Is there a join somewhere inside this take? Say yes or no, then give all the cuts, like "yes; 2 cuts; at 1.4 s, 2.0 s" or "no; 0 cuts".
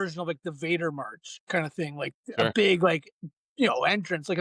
no; 0 cuts